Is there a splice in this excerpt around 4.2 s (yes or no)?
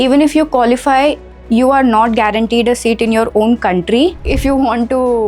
yes